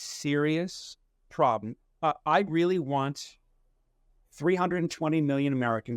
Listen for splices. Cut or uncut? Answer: cut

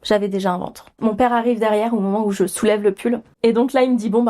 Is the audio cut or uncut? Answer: cut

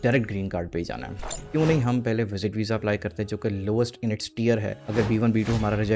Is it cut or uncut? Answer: uncut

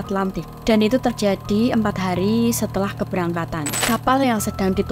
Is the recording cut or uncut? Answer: cut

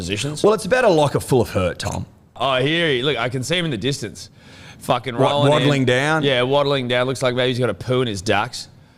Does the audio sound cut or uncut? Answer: cut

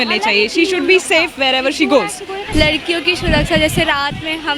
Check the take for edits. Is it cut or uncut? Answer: cut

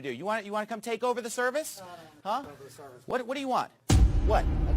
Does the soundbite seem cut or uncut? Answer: cut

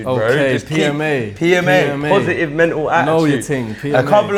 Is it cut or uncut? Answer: uncut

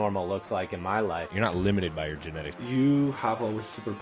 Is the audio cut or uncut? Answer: uncut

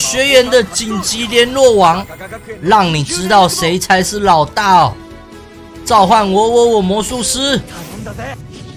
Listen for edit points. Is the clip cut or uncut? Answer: uncut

